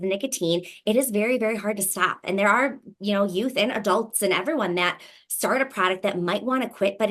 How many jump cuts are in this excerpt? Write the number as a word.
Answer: zero